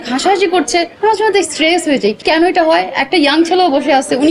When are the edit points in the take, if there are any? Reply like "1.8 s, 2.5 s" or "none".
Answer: 2.2 s